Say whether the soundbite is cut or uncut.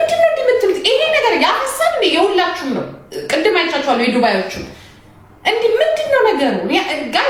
uncut